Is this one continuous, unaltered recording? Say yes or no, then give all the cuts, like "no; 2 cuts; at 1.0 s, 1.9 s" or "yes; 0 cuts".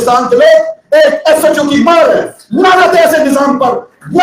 yes; 0 cuts